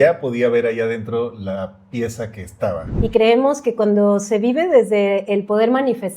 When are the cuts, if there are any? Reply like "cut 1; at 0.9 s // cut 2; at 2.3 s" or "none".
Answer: cut 1; at 2.9 s